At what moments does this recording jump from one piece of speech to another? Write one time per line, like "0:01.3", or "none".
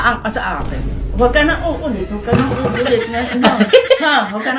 0:01.0